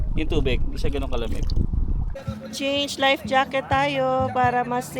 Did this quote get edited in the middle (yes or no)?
yes